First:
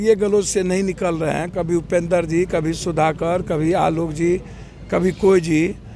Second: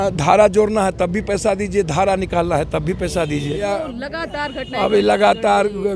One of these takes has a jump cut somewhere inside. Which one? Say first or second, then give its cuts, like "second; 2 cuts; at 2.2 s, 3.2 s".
second; 1 cut; at 3.7 s